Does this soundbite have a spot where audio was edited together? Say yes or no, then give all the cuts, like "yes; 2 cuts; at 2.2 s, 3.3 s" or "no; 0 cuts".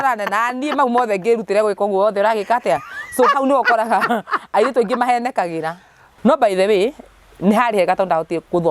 yes; 1 cut; at 6.1 s